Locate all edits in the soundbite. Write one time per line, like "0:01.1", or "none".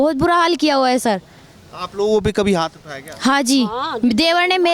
none